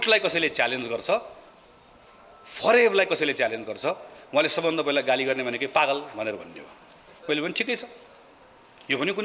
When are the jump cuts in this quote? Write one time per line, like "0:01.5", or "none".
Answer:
none